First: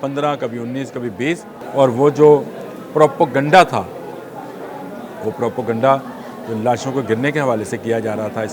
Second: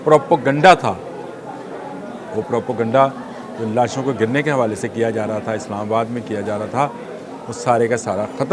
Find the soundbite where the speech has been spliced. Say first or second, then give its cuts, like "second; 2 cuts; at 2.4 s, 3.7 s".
first; 1 cut; at 1.5 s